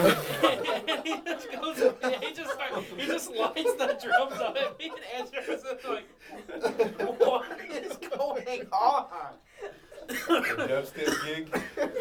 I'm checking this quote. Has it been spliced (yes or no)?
no